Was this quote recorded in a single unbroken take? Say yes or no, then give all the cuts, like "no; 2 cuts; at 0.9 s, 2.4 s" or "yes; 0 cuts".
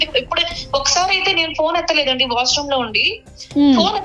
yes; 0 cuts